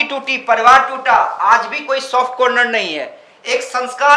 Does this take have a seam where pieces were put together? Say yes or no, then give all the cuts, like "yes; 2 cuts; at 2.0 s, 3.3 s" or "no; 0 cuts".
no; 0 cuts